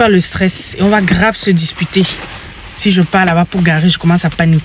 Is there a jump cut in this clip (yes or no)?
no